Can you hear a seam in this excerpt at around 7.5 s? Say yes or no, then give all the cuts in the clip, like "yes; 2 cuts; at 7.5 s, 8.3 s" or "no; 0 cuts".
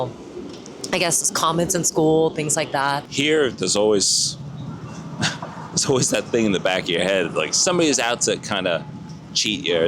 yes; 2 cuts; at 3.0 s, 7.5 s